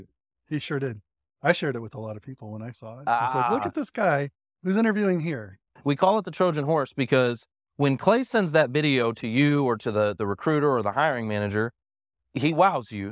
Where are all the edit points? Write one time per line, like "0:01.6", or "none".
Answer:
0:05.7